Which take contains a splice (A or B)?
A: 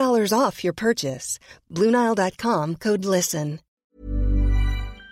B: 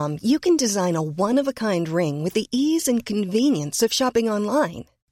A